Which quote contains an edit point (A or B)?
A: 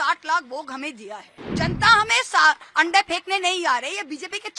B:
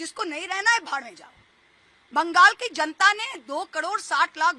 A